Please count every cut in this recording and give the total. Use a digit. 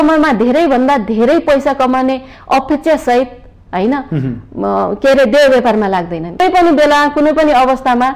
1